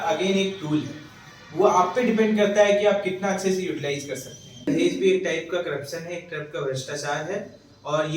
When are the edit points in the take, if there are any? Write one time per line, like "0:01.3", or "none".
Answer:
0:04.6

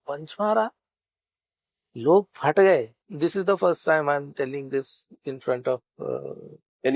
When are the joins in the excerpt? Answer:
0:03.0

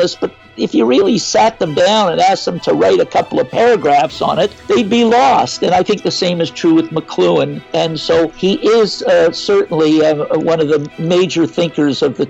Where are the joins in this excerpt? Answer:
0:04.6
0:08.0
0:10.9

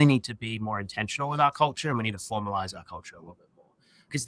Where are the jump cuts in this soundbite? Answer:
none

